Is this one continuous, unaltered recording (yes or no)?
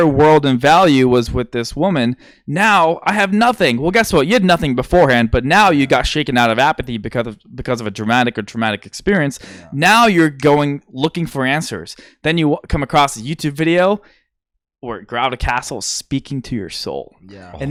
yes